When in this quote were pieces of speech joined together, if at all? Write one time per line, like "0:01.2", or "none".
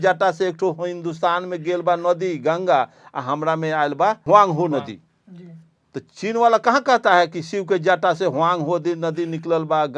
0:04.2